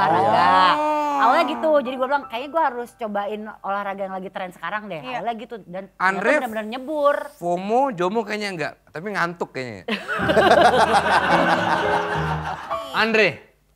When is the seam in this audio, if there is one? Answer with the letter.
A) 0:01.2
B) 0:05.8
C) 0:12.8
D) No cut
C